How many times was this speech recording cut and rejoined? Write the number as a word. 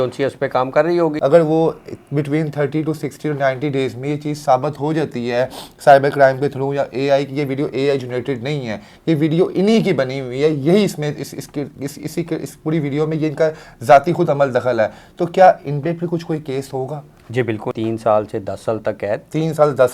two